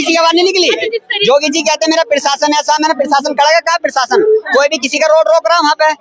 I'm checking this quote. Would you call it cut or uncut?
cut